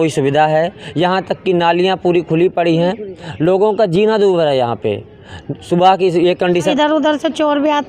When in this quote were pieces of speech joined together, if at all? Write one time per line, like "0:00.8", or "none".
0:06.7